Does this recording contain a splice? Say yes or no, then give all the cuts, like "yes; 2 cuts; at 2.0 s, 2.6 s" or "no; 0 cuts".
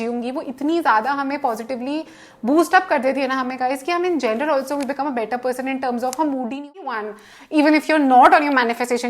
yes; 1 cut; at 6.9 s